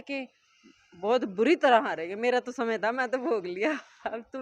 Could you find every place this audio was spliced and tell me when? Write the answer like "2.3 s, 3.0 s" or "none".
none